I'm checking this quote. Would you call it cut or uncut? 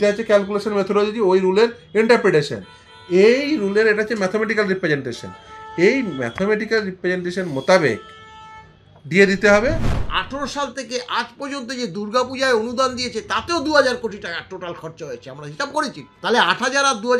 cut